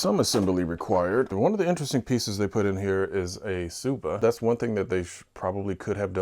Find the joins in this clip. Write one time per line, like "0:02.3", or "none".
0:01.3
0:04.2